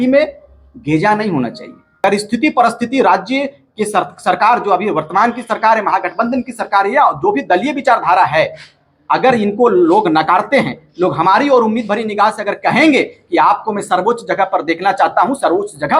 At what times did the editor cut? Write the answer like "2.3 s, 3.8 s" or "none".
2.0 s